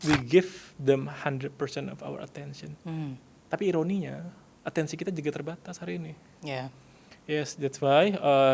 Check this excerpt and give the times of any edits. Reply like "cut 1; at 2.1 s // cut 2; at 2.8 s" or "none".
cut 1; at 3.3 s